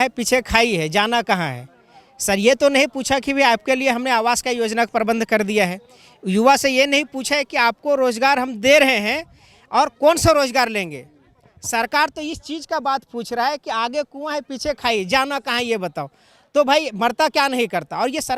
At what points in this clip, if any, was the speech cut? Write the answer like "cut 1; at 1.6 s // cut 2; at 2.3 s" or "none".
none